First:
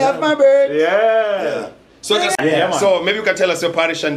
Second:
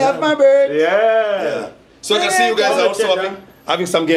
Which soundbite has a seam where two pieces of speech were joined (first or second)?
first